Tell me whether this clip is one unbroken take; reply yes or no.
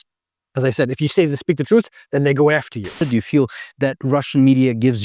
no